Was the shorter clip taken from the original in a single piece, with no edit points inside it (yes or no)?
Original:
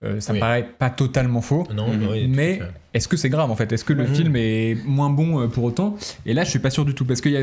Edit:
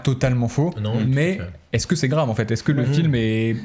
no